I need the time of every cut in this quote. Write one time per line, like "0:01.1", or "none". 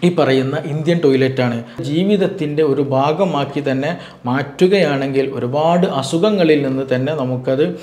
0:01.8